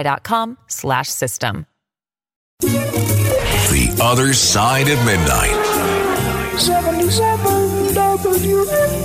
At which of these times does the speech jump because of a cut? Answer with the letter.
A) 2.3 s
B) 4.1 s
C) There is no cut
A